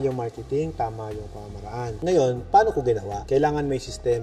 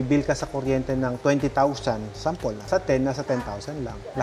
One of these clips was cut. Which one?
first; 1 cut; at 1.9 s

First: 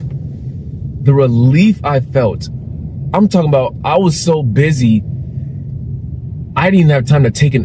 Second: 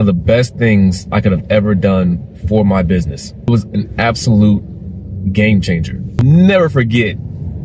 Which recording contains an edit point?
second; 2 cuts; at 3.5 s, 6.2 s

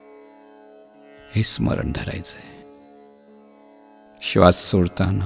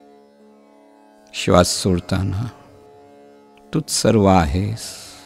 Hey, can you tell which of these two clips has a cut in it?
first; 1 cut; at 1.0 s

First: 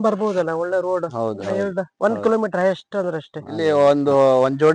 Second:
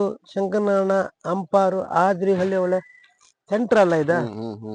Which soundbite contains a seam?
first; 1 cut; at 3.4 s

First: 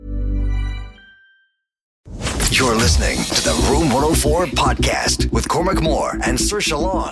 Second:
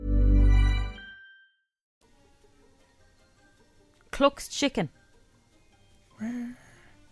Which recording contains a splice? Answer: first; 1 cut; at 2.1 s

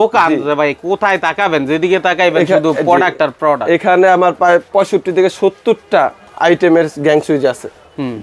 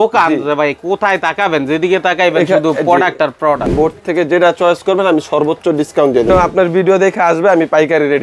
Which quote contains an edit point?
second; 2 cuts; at 3.7 s, 6.3 s

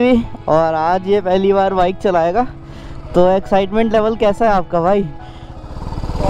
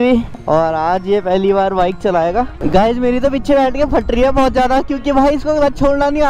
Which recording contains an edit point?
second; 1 cut; at 2.6 s

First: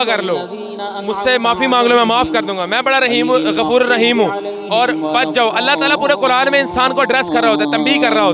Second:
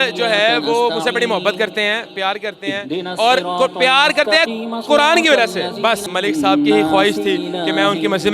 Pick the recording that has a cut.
second; 1 cut; at 6.1 s

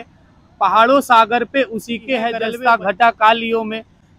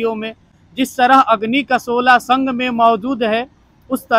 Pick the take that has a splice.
first; 1 cut; at 2.5 s

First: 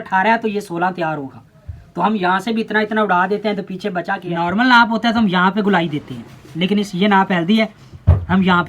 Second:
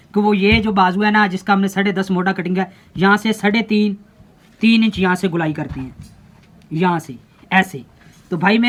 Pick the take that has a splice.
first; 1 cut; at 4.3 s

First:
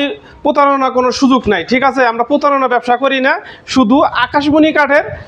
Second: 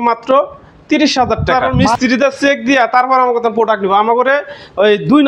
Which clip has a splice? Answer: second; 1 cut; at 1.7 s

